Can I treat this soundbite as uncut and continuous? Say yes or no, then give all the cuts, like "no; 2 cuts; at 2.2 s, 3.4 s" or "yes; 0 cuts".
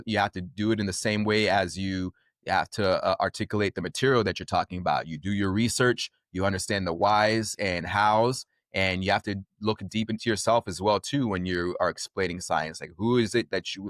yes; 0 cuts